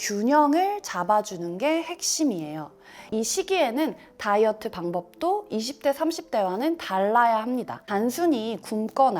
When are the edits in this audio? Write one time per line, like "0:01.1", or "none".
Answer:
0:03.0